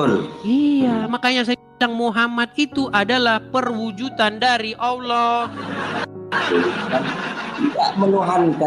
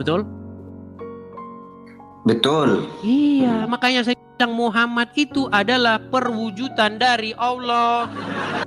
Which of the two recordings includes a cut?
first; 1 cut; at 7.0 s

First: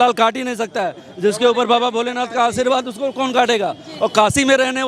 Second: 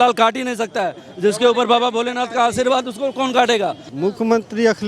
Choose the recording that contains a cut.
second; 1 cut; at 3.8 s

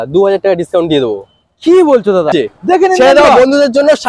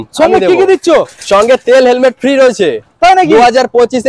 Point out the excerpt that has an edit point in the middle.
first; 1 cut; at 2.3 s

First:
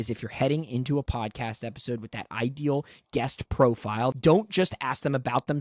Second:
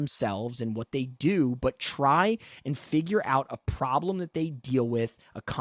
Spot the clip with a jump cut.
first; 1 cut; at 4.1 s

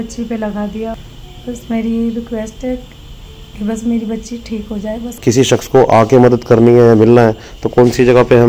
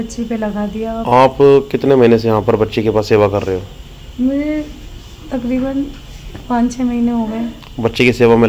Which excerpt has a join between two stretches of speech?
first; 2 cuts; at 0.9 s, 5.1 s

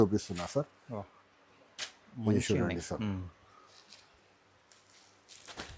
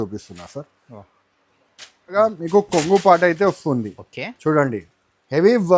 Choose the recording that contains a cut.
second; 1 cut; at 2.2 s

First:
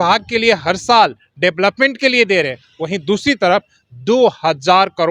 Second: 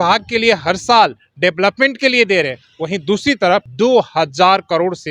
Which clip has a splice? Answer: second; 1 cut; at 3.7 s

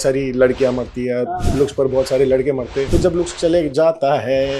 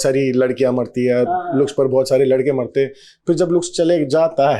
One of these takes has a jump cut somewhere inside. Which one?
first; 1 cut; at 2.8 s

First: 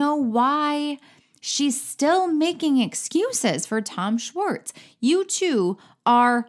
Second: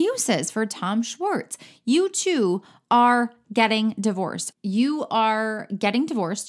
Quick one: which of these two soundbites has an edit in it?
second; 1 cut; at 4.4 s

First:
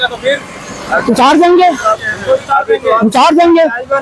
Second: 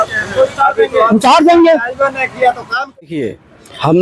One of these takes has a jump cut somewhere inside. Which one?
second; 1 cut; at 3.1 s

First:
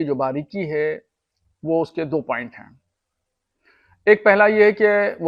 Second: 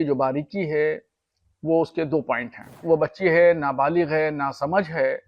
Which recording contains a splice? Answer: second; 1 cut; at 2.8 s

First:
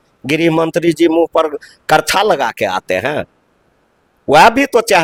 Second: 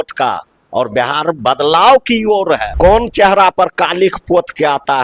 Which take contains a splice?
second; 1 cut; at 2.7 s

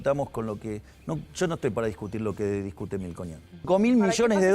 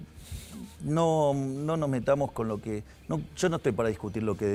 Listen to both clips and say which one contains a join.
first; 1 cut; at 3.7 s

